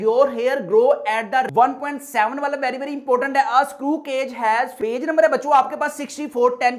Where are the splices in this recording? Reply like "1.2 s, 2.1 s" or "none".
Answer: 1.5 s, 4.7 s